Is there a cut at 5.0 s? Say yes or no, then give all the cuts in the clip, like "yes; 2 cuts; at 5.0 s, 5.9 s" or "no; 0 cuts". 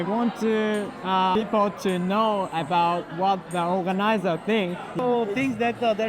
yes; 2 cuts; at 1.3 s, 5.0 s